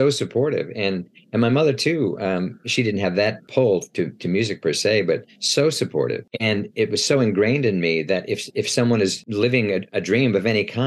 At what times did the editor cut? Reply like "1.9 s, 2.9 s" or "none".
3.4 s, 6.3 s, 9.2 s